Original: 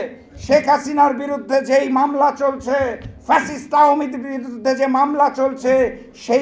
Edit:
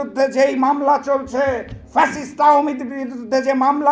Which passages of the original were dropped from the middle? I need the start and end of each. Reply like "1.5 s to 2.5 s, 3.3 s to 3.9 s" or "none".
none